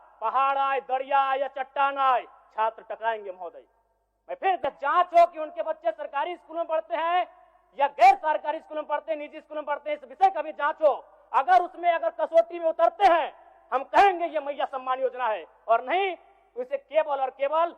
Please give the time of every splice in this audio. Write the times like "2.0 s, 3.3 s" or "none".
4.6 s